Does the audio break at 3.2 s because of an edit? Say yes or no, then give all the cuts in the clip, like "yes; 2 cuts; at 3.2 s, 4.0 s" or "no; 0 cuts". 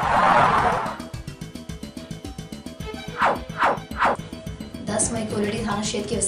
yes; 3 cuts; at 1.0 s, 3.2 s, 4.2 s